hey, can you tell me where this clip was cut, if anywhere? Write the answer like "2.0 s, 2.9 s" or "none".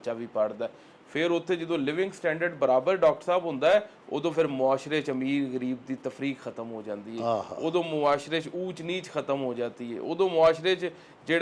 none